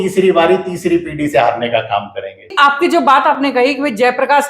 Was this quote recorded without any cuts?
no; 1 cut; at 2.5 s

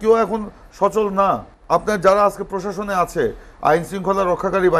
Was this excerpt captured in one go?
no; 1 cut; at 1.5 s

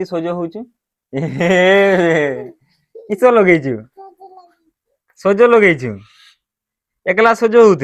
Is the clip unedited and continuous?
no; 1 cut; at 1.0 s

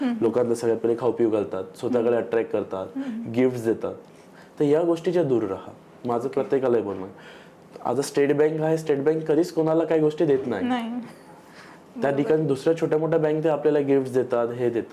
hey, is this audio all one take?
yes; 0 cuts

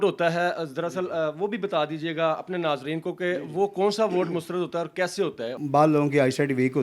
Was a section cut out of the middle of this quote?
yes; 1 cut; at 5.5 s

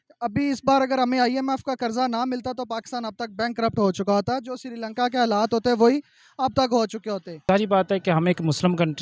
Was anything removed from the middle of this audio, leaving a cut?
yes; 1 cut; at 7.4 s

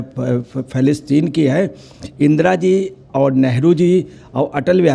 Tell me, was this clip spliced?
no; 0 cuts

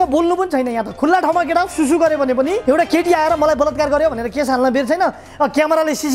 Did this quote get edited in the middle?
yes; 1 cut; at 2.6 s

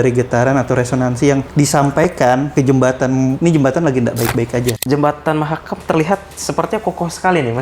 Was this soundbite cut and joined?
yes; 4 cuts; at 1.5 s, 2.5 s, 3.4 s, 4.8 s

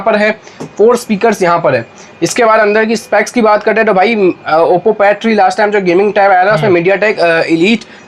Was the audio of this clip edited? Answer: no; 0 cuts

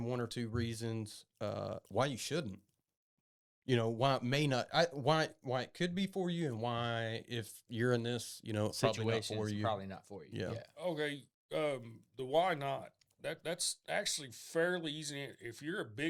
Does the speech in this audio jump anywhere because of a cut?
no; 0 cuts

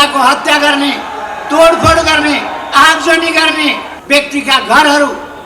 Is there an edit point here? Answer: yes; 1 cut; at 3.9 s

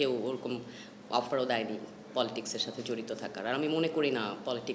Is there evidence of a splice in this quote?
no; 0 cuts

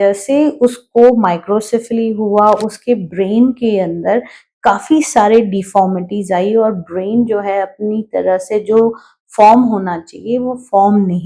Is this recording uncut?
yes; 0 cuts

